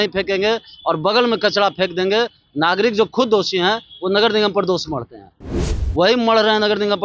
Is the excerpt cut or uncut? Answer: cut